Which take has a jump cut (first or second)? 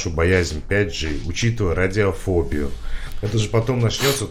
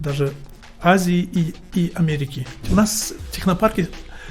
second